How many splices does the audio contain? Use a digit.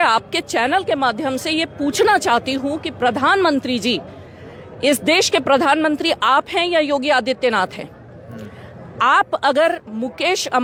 0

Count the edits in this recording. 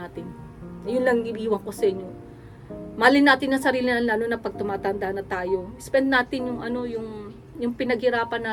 0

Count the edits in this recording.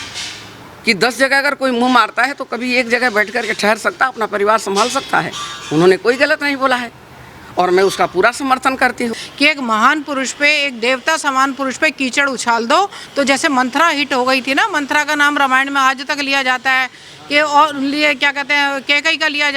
1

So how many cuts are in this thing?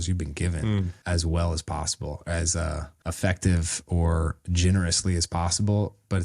2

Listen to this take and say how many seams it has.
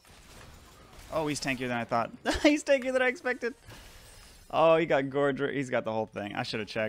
0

